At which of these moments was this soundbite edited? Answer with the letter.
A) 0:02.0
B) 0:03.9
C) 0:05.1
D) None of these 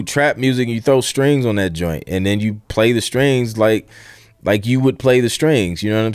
D